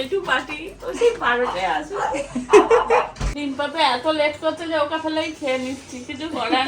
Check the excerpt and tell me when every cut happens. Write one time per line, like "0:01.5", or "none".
0:03.2